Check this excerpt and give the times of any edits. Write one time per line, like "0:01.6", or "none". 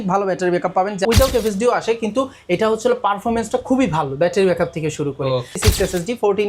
0:01.0
0:05.5